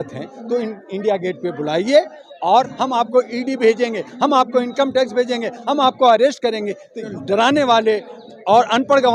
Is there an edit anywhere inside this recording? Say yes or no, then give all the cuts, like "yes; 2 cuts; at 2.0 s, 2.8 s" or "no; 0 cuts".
yes; 2 cuts; at 2.7 s, 7.0 s